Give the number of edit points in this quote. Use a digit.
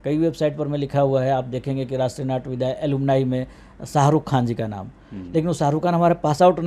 0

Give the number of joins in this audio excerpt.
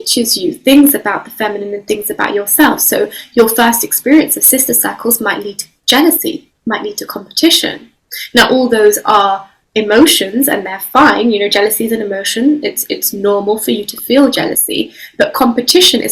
0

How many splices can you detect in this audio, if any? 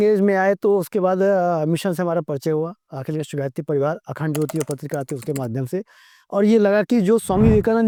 0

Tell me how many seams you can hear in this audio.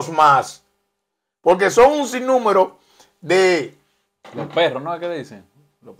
0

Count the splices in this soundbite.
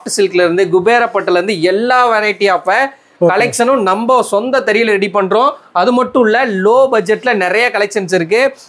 0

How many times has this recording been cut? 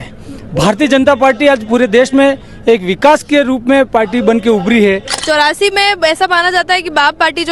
1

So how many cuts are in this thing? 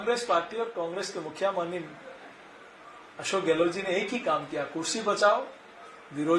0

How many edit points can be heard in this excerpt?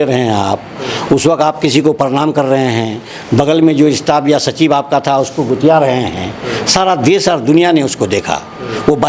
0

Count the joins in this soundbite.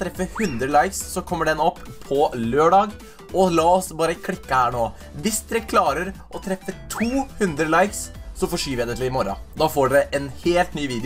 0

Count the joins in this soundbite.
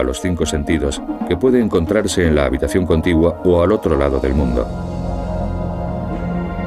0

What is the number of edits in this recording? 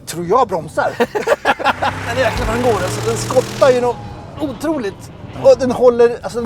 1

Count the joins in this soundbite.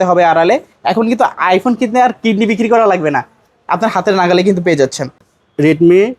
1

